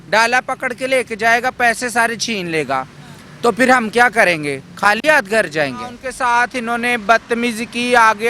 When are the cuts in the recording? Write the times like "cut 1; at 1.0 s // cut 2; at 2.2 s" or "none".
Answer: cut 1; at 6.0 s